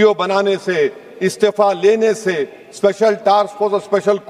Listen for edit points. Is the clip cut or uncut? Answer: uncut